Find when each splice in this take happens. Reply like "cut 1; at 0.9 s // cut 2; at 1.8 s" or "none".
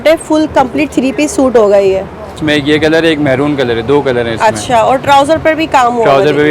cut 1; at 2.4 s